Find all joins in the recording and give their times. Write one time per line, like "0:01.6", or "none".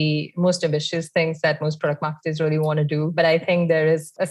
0:03.1